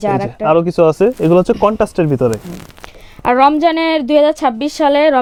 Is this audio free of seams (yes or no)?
yes